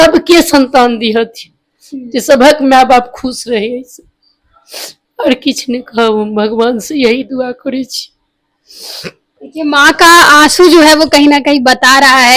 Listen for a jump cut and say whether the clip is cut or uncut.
uncut